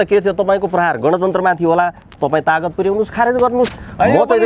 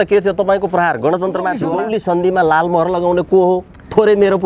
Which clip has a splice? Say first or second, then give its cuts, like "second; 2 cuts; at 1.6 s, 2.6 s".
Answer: second; 1 cut; at 1.6 s